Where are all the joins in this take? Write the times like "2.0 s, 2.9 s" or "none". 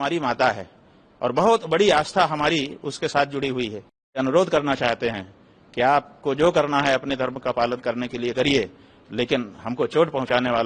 4.2 s